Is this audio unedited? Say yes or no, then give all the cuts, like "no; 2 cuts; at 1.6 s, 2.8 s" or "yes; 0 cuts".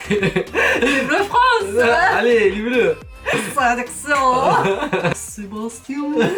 no; 2 cuts; at 3.3 s, 5.1 s